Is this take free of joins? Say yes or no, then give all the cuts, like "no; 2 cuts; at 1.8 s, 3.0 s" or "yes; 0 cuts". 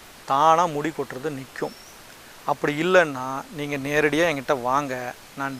yes; 0 cuts